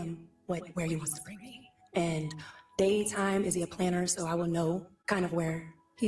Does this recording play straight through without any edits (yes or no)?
no